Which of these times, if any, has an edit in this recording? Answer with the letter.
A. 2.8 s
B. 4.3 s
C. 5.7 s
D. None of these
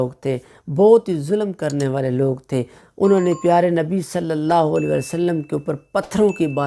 A